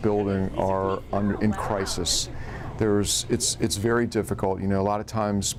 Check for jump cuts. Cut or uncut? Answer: uncut